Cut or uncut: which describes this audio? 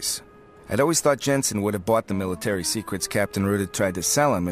cut